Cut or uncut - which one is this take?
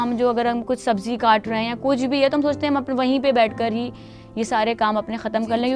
uncut